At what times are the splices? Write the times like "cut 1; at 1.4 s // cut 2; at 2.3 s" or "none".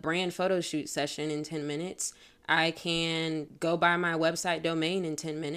cut 1; at 3.5 s